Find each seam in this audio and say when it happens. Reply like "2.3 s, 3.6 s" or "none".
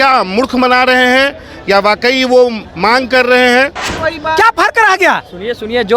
3.9 s